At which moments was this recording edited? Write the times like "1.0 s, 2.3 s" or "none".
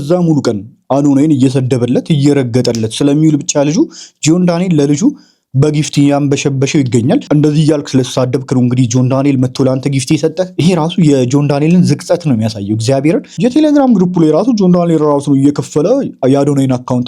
7.3 s, 10.6 s, 13.4 s